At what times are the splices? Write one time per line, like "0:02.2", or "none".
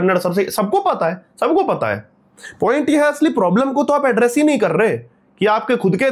none